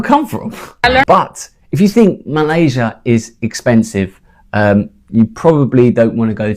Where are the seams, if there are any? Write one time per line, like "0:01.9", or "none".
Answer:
0:01.0